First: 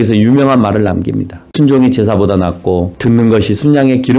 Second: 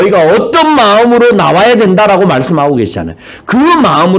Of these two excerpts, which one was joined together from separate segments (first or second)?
first